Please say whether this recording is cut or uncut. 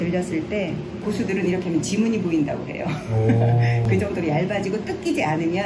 cut